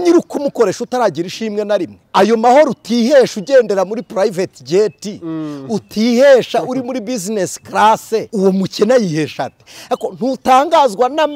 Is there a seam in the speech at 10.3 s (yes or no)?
no